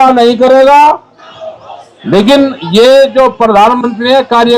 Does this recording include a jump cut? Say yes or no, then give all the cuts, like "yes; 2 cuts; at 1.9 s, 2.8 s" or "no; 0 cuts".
yes; 1 cut; at 1.3 s